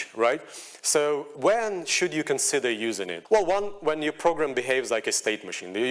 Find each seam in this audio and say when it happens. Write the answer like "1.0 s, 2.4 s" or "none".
3.1 s